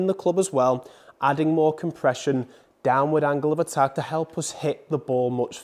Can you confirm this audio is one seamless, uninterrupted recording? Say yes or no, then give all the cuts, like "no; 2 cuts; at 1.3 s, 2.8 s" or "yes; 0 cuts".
no; 1 cut; at 3.9 s